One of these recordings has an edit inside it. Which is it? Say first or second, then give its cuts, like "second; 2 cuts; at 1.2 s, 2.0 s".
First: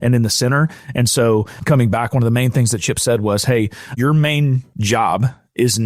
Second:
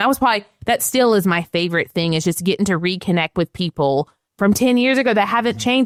first; 3 cuts; at 1.5 s, 3.9 s, 4.7 s